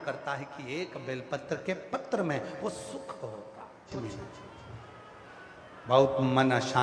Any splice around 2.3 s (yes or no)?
no